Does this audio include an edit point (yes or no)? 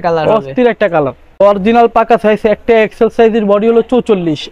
yes